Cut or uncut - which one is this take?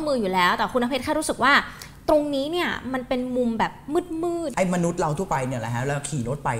cut